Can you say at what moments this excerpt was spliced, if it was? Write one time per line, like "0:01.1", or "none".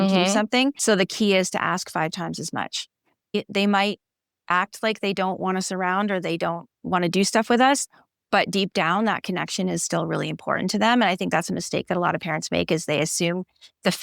0:03.3